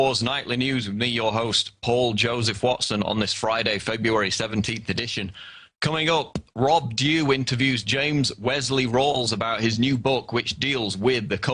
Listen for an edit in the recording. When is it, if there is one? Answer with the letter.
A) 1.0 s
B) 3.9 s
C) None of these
A